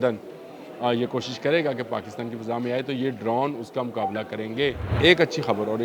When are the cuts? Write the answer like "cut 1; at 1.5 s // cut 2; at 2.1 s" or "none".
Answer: cut 1; at 4.9 s

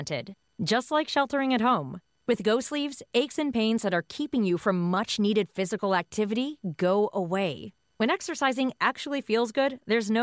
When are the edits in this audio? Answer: none

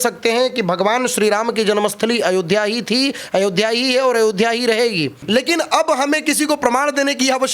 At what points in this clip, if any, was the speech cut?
cut 1; at 5.2 s

